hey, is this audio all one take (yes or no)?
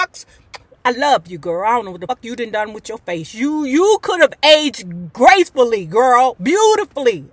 no